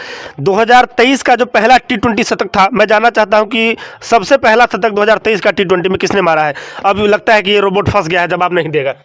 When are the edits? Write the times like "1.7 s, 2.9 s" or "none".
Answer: none

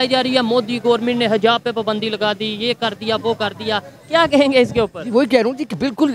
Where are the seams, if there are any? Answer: none

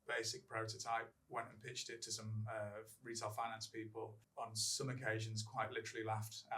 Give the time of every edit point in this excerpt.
4.2 s

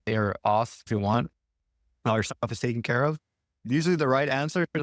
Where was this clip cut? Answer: 0.9 s, 3.6 s

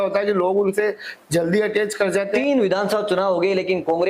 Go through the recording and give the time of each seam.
2.3 s

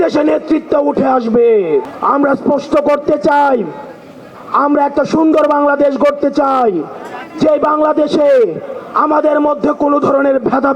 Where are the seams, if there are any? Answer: none

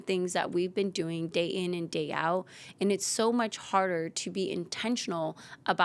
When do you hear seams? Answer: none

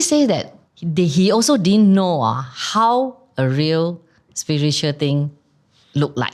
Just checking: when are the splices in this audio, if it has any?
none

